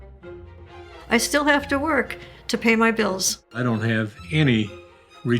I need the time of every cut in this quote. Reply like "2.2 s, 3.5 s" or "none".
3.5 s